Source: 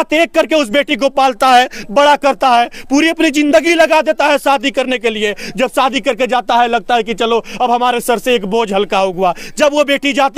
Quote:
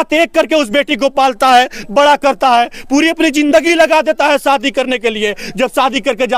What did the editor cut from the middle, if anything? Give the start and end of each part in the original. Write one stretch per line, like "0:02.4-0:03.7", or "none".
none

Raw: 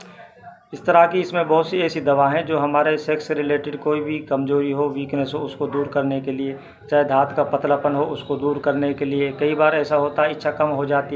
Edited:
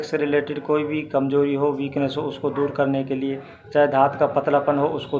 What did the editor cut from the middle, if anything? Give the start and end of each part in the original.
none

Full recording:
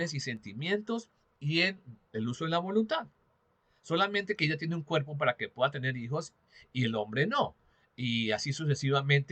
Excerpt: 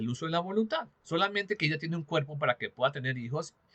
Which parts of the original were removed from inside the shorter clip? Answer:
0:03.1-0:03.7

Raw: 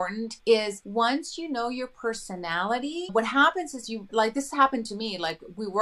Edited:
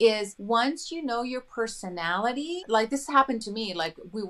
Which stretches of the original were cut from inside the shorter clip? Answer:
0:03.1-0:04.0

